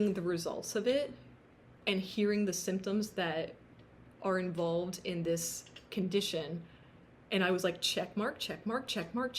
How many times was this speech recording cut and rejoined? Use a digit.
0